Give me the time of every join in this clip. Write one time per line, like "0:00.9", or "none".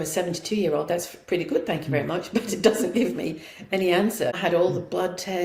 0:04.3